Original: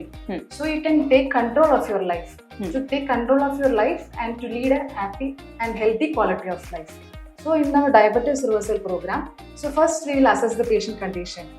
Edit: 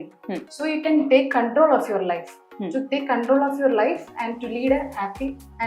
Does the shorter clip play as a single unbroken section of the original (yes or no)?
yes